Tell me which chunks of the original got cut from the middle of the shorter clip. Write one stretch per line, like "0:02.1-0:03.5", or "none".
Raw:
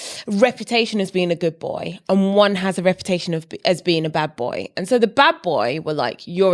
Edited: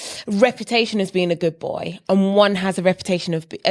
none